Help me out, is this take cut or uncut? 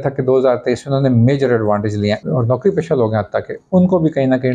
cut